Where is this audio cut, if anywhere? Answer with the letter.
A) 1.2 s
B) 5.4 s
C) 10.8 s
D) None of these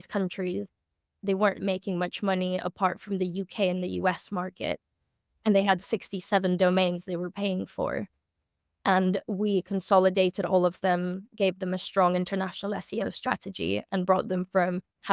A